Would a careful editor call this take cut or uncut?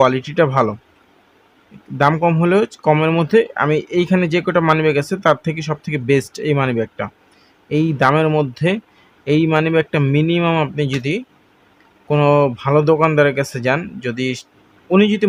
uncut